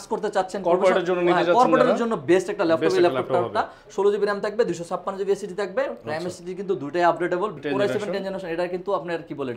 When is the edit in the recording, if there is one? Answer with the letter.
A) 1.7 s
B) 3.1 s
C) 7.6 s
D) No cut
C